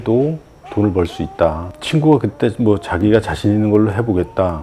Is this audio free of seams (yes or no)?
no